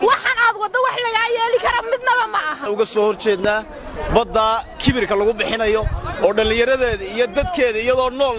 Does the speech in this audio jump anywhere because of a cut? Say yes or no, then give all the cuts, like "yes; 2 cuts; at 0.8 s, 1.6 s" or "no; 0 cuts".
yes; 1 cut; at 2.6 s